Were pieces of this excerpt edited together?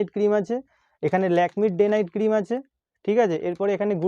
no; 0 cuts

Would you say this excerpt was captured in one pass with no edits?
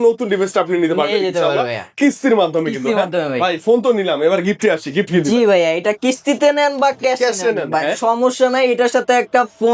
yes; 0 cuts

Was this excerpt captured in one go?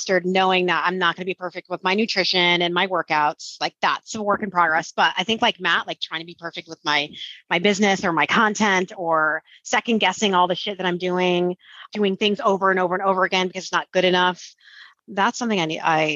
no; 1 cut; at 11.9 s

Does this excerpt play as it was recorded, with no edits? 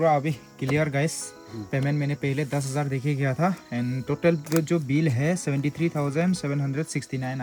yes; 0 cuts

